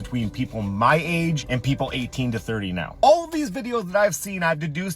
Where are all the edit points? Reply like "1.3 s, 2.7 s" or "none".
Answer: 1.4 s, 3.0 s